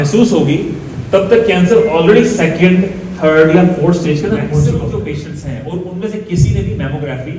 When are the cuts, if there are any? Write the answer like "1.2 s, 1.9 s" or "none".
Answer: 4.7 s